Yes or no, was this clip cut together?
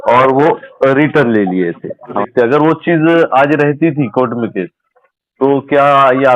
yes